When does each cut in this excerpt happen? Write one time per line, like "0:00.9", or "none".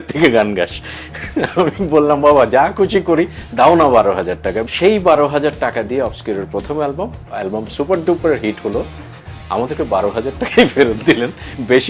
0:04.7
0:07.2